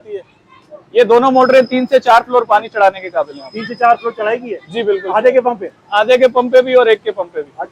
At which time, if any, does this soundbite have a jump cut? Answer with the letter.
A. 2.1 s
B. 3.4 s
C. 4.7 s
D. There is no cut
D